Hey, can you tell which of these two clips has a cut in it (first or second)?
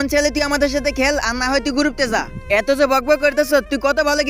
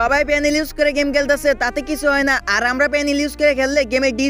first